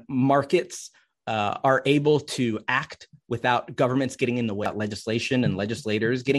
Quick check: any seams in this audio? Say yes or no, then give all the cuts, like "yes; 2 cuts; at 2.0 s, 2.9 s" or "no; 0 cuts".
yes; 1 cut; at 4.7 s